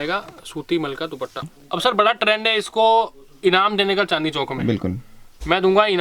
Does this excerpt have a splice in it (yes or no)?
yes